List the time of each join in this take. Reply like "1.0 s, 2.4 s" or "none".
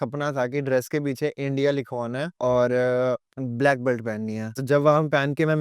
2.3 s, 3.4 s, 4.6 s

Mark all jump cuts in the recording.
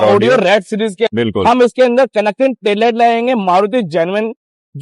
1.1 s

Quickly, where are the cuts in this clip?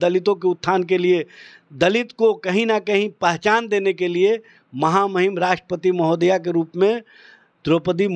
none

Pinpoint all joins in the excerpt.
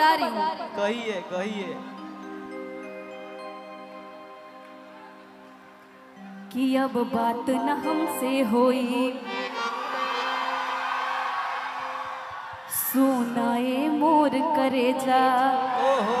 none

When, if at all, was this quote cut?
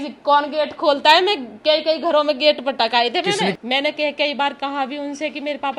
3.5 s

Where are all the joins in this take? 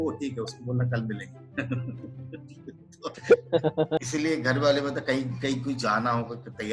4.1 s

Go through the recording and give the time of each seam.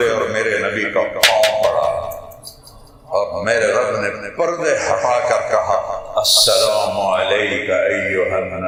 none

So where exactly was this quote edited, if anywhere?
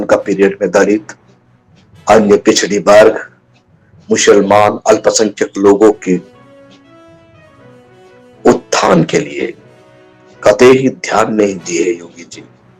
6.3 s, 7.9 s

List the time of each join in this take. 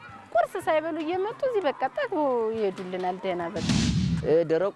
3.9 s

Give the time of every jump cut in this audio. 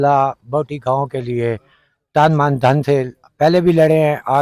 none

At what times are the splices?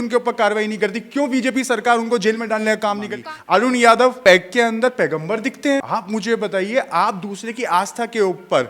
3.1 s, 4.2 s, 5.8 s

